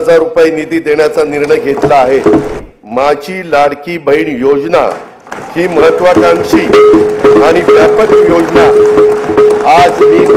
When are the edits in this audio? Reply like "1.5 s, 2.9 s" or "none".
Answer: 2.5 s